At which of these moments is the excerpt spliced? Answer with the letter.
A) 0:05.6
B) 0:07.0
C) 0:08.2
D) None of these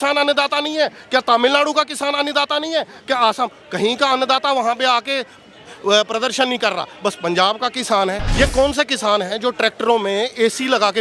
C